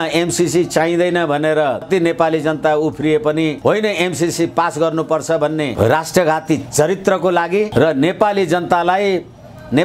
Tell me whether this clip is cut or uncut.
cut